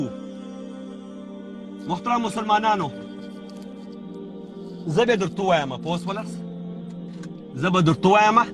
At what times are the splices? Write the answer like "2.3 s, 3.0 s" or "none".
3.0 s, 4.5 s, 6.2 s, 7.6 s